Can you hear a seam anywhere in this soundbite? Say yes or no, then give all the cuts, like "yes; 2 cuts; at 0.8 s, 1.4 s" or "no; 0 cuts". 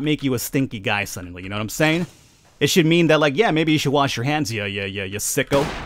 no; 0 cuts